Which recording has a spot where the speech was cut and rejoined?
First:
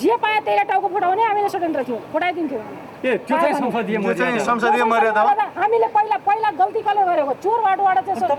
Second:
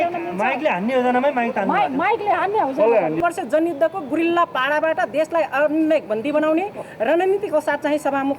second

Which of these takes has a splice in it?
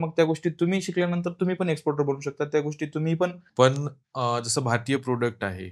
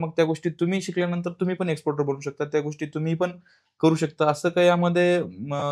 first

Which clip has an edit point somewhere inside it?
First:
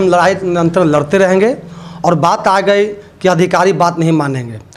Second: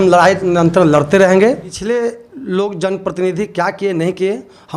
second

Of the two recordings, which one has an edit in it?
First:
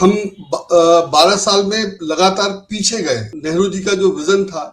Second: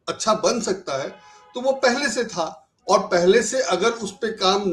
first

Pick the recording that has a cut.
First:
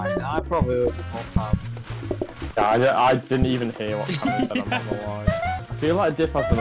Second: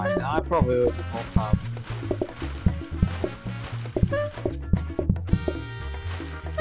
first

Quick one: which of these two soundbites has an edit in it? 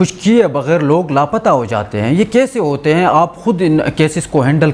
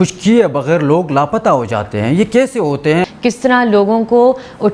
second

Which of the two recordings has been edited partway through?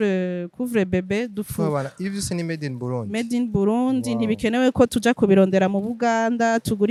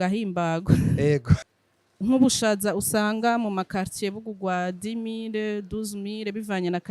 second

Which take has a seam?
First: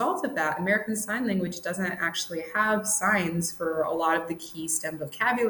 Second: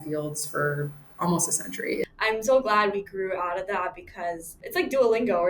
second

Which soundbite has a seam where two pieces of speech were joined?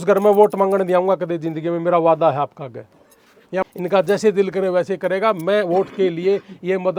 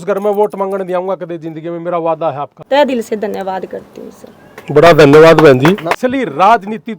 second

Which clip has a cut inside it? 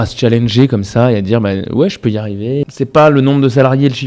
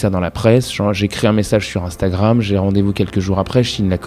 first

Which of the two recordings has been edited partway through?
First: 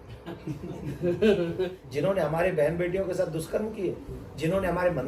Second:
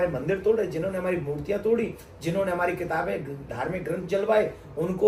first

